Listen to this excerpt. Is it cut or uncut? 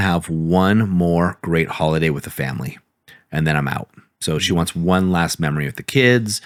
uncut